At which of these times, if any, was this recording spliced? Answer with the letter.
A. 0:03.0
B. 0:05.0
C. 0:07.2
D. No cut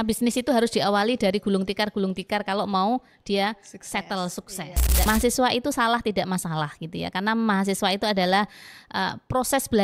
B